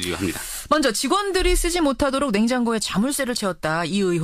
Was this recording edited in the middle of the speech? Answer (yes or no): yes